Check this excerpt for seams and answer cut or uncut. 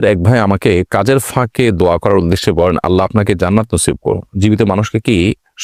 uncut